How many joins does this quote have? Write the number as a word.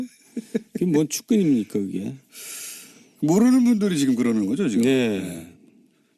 one